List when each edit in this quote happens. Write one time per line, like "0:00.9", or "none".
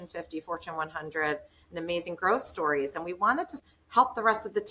0:03.5